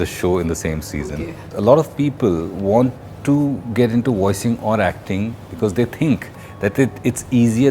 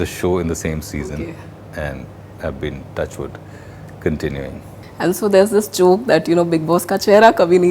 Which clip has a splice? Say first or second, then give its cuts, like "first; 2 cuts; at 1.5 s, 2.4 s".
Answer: first; 1 cut; at 1.5 s